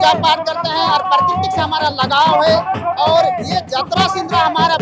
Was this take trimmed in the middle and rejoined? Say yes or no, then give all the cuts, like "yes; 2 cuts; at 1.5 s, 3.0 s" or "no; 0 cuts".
no; 0 cuts